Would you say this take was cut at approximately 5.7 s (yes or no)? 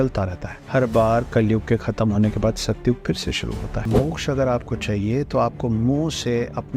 no